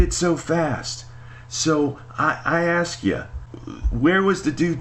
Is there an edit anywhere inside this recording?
no; 0 cuts

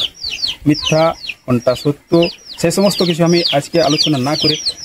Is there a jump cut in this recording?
no; 0 cuts

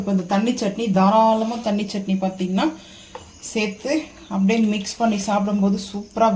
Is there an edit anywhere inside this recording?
yes; 1 cut; at 1.0 s

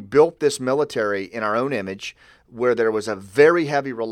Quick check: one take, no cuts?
yes; 0 cuts

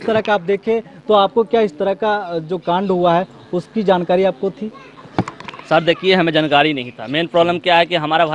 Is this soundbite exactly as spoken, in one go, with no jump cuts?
yes; 0 cuts

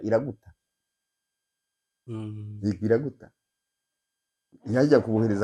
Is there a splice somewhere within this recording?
no; 0 cuts

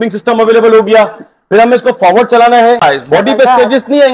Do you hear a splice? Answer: yes; 1 cut; at 2.8 s

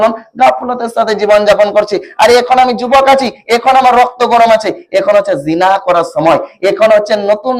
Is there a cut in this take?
no; 0 cuts

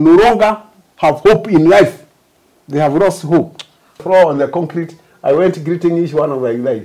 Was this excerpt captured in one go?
no; 1 cut; at 4.0 s

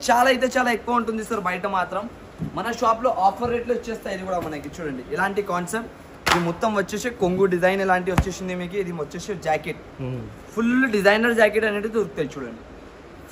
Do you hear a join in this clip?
no; 0 cuts

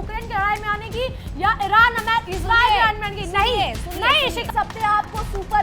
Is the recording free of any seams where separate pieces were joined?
no; 1 cut; at 4.4 s

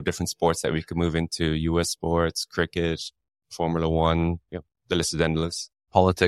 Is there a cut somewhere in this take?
no; 0 cuts

